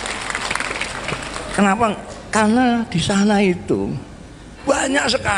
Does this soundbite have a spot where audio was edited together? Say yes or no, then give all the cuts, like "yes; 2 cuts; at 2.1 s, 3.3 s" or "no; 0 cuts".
yes; 1 cut; at 4.5 s